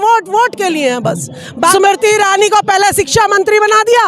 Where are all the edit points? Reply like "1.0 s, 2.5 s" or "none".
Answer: 1.7 s